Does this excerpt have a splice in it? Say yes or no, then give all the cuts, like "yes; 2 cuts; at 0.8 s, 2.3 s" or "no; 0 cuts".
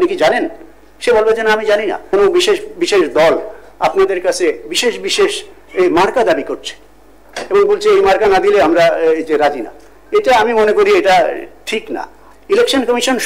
yes; 1 cut; at 2.0 s